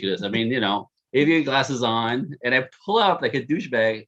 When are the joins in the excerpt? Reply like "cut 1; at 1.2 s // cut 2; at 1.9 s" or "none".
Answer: cut 1; at 1.0 s